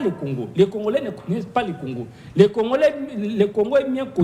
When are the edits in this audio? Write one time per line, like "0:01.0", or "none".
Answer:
none